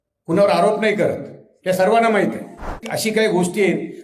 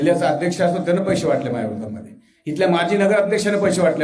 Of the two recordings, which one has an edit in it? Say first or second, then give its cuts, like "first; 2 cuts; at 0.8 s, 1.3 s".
first; 1 cut; at 2.9 s